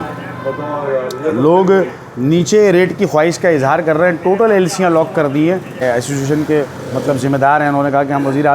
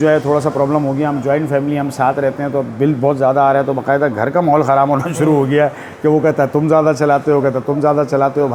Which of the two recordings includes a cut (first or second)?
first